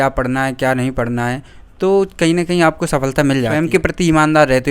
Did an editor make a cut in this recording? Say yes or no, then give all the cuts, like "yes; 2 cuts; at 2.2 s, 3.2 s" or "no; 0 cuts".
yes; 1 cut; at 3.6 s